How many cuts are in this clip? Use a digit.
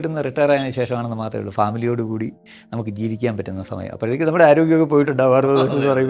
0